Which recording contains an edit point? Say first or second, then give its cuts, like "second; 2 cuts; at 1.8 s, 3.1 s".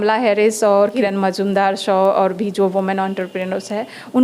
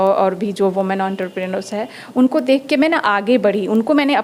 first; 1 cut; at 0.9 s